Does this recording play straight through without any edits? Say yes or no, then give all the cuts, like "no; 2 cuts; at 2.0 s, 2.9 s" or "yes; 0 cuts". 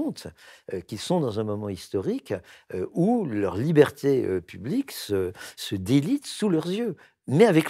yes; 0 cuts